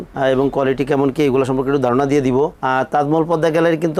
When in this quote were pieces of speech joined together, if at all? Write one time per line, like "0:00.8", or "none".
none